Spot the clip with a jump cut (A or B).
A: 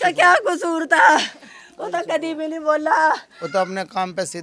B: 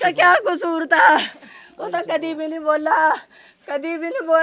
A